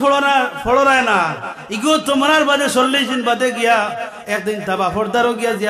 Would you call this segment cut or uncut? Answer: uncut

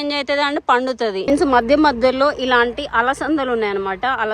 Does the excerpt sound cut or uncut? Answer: cut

